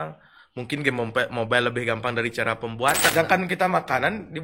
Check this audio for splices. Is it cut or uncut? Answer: cut